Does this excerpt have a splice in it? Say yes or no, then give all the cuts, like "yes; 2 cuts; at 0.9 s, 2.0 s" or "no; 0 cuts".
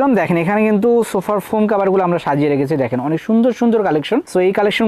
no; 0 cuts